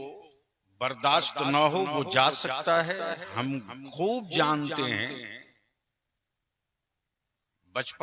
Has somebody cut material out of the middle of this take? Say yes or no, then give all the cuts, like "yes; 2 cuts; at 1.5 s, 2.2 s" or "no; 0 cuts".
no; 0 cuts